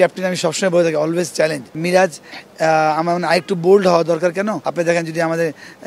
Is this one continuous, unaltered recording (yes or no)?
no